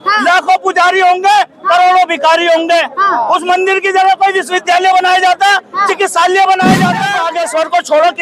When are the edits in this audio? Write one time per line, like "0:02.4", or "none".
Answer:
0:07.2